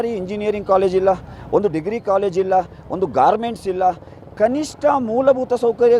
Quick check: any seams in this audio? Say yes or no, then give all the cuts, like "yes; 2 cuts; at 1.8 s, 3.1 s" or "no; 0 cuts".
no; 0 cuts